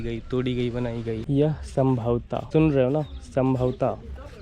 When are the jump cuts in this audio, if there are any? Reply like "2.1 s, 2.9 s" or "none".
1.2 s, 2.4 s

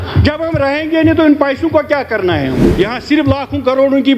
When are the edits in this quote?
2.7 s

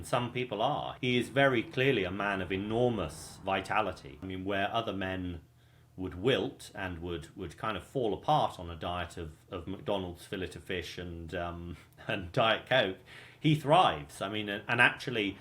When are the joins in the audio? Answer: 0.9 s, 3.3 s, 4.2 s

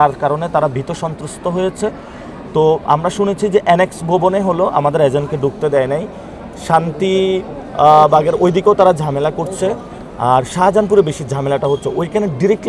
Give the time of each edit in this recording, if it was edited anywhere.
none

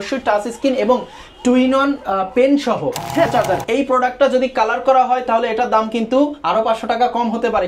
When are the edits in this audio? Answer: 3.3 s

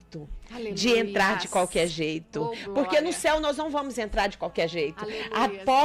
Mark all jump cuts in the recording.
none

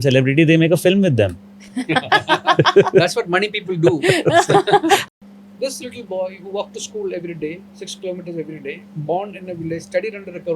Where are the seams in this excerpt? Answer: 5.0 s

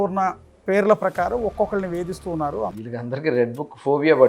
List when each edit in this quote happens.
2.7 s

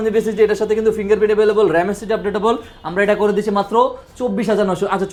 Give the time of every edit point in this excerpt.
none

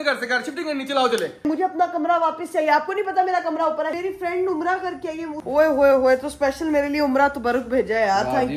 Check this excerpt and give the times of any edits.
1.4 s, 3.9 s, 5.4 s

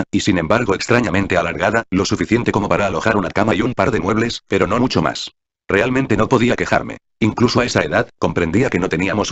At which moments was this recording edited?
2.6 s

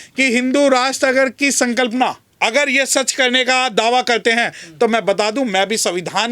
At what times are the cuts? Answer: 2.2 s

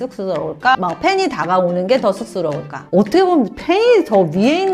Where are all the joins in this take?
2.8 s

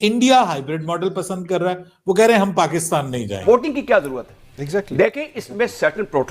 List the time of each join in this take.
3.4 s

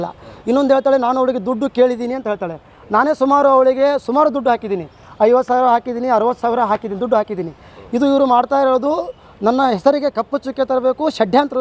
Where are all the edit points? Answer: none

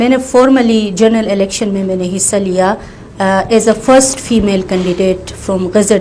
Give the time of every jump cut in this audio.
none

